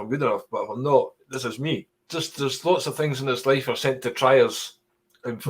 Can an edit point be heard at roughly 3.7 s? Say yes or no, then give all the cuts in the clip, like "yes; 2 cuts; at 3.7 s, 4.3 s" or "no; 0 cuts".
no; 1 cut; at 2.0 s